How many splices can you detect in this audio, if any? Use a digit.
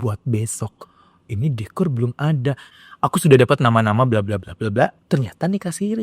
2